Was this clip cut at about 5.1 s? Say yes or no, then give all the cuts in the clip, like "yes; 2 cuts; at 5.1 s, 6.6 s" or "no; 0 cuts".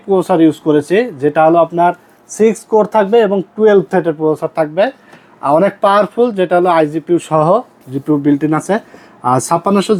no; 0 cuts